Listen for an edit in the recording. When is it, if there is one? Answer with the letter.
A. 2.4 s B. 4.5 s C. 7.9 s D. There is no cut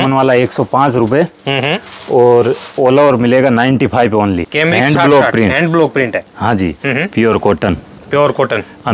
B